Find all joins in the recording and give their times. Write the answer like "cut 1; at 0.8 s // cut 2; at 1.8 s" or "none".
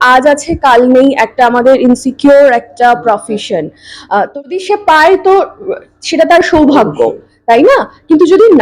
cut 1; at 4.5 s